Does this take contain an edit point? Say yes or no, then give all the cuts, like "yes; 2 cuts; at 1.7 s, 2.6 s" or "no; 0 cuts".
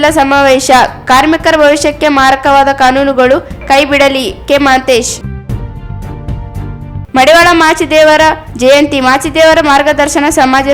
yes; 2 cuts; at 5.2 s, 6.7 s